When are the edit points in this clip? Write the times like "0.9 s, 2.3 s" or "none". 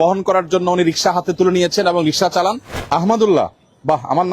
2.7 s